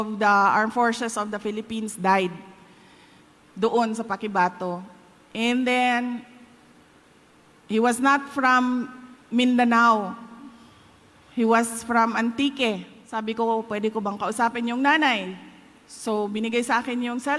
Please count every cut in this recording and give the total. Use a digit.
1